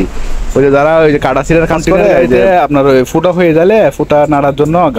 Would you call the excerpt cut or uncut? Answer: cut